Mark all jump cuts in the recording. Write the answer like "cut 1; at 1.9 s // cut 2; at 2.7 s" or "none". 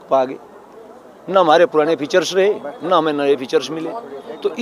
none